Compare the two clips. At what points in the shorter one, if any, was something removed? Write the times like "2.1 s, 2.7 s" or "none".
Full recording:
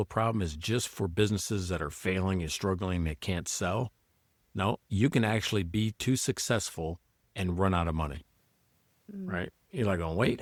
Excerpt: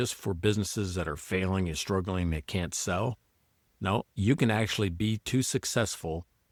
none